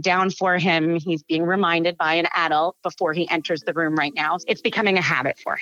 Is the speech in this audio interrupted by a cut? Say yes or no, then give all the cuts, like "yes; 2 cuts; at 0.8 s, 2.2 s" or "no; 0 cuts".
yes; 1 cut; at 4.4 s